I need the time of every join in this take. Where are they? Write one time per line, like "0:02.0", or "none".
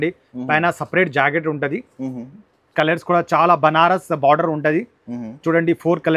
none